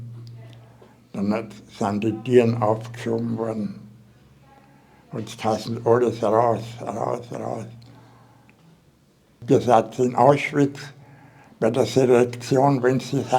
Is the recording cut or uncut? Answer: cut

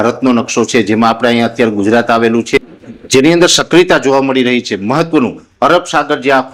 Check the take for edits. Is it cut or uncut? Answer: uncut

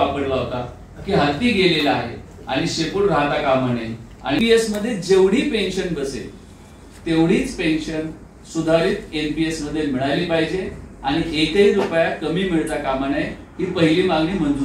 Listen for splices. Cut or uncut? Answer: cut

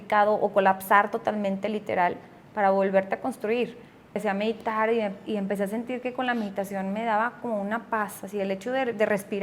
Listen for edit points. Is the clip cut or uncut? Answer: cut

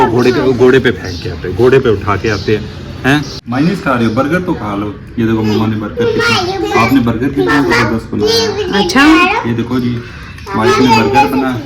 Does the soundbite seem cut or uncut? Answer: cut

